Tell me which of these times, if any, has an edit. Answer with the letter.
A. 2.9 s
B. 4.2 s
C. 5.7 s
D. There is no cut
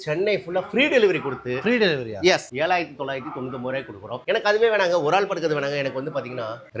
D